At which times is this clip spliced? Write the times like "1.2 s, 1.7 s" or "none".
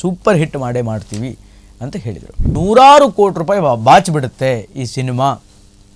2.5 s